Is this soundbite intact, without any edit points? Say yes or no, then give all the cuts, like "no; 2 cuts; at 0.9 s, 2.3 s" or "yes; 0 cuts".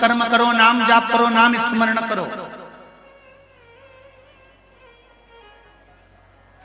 yes; 0 cuts